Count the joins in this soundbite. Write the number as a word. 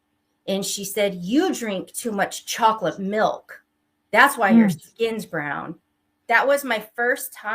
one